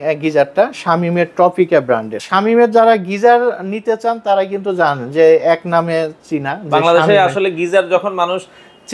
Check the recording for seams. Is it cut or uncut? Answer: cut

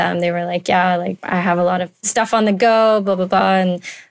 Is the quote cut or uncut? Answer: cut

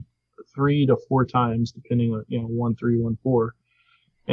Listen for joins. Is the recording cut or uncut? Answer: uncut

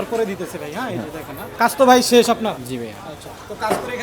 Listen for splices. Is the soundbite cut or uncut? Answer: cut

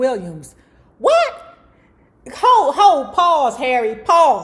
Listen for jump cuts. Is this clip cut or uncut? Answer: uncut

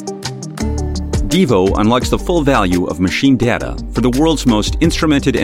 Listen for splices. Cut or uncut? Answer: cut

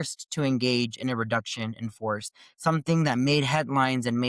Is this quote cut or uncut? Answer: uncut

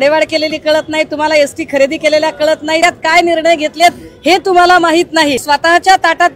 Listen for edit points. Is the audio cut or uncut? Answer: cut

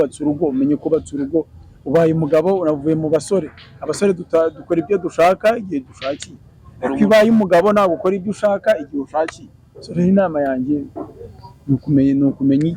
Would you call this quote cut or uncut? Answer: uncut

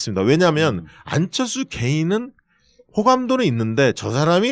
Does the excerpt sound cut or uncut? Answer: cut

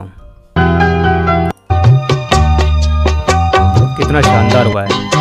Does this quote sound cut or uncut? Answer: uncut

